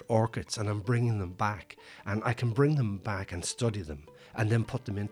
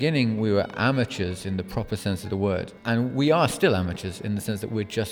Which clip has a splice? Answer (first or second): second